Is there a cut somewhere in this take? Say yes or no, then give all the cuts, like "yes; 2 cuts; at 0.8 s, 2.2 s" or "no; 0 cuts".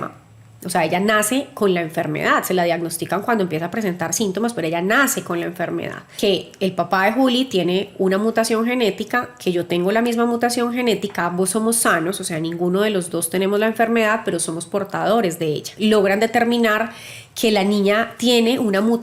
yes; 2 cuts; at 6.0 s, 15.7 s